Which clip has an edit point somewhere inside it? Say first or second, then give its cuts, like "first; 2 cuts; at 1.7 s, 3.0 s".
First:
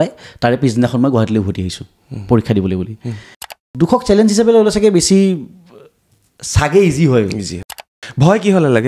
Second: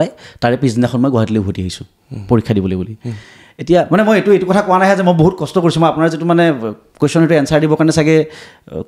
first; 2 cuts; at 3.6 s, 7.5 s